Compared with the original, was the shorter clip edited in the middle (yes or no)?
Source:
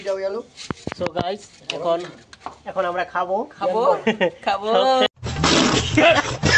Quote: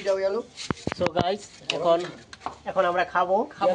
no